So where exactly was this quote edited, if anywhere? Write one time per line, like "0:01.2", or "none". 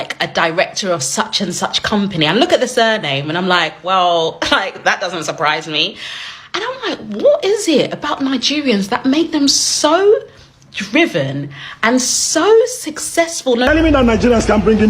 0:13.7